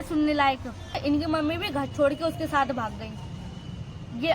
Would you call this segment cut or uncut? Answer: cut